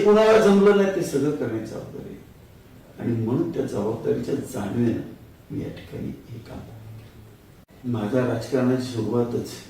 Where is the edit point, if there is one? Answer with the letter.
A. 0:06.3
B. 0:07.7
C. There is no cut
B